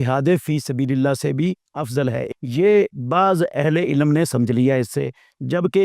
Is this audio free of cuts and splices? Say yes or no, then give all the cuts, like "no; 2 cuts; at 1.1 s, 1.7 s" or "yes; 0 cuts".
no; 1 cut; at 2.3 s